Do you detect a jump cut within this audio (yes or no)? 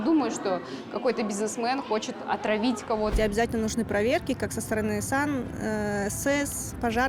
yes